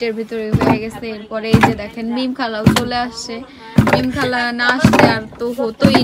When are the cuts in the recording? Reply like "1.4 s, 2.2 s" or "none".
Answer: none